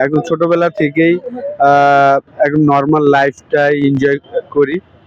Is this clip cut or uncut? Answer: uncut